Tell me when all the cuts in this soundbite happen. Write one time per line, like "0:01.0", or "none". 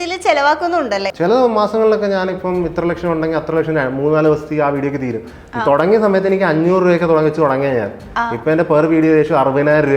0:01.1